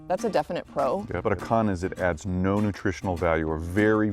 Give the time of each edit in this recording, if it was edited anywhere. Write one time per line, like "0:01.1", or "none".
0:01.1